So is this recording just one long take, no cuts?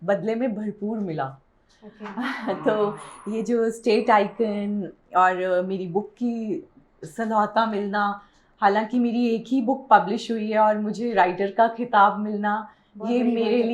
yes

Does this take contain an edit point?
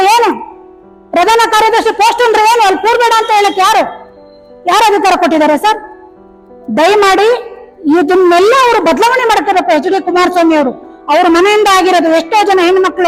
no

